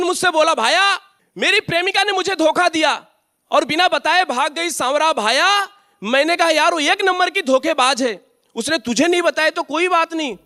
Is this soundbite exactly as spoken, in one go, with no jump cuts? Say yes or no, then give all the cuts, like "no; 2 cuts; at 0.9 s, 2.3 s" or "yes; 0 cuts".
yes; 0 cuts